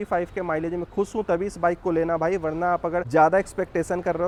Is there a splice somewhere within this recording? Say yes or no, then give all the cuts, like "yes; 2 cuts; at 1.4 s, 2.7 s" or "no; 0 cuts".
no; 0 cuts